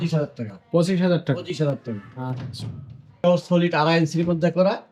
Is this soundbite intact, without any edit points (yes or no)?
no